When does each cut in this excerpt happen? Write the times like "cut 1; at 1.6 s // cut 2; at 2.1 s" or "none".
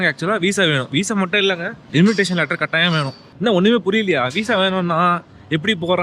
cut 1; at 1.7 s // cut 2; at 3.2 s